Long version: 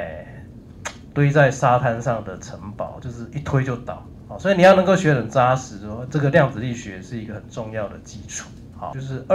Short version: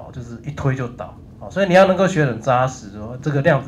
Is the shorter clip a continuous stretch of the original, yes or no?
yes